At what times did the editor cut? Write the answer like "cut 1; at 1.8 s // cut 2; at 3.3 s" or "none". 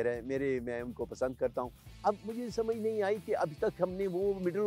cut 1; at 1.8 s